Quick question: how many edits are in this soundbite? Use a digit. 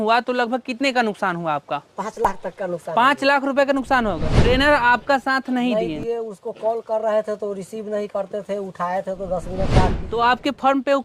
2